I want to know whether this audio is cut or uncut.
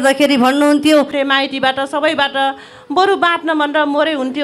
cut